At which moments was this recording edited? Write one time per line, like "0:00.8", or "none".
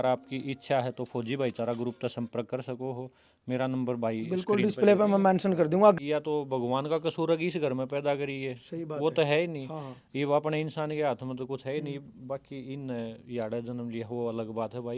0:06.0

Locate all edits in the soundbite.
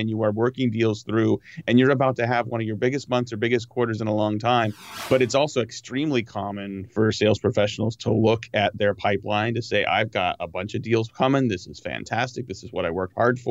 0:04.9
0:06.9

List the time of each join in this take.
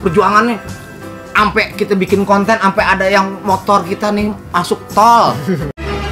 none

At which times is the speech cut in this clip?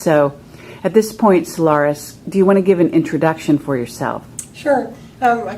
0:03.6

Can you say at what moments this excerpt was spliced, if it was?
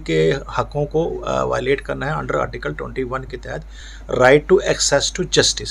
none

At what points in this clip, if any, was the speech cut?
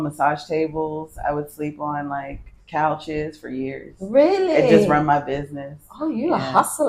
none

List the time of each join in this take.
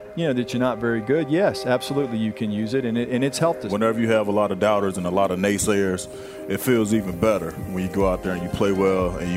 0:03.7

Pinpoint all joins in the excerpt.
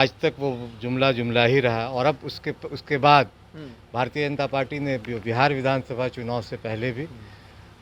none

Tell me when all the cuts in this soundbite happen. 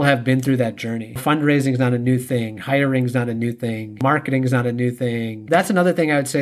0:01.2
0:05.5

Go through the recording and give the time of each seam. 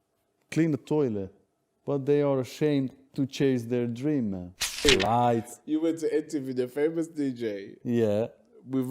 0:05.0

